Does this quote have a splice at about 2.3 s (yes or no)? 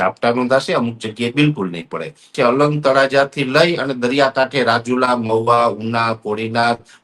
yes